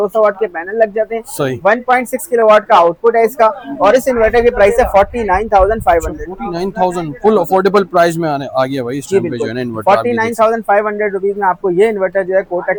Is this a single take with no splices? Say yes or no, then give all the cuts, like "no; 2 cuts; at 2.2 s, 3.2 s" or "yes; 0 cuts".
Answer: yes; 0 cuts